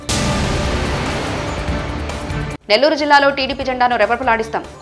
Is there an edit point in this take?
no; 0 cuts

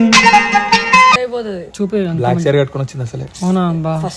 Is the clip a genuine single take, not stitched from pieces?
no; 1 cut; at 1.2 s

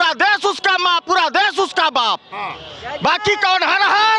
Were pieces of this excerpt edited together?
no; 0 cuts

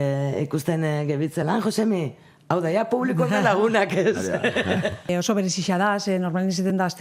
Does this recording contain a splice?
yes; 1 cut; at 5.1 s

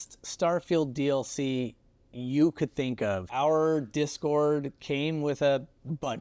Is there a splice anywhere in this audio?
yes; 1 cut; at 3.3 s

